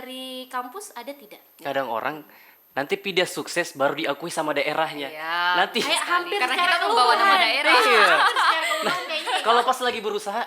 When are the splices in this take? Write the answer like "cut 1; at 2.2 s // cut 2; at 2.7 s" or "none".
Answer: cut 1; at 1.6 s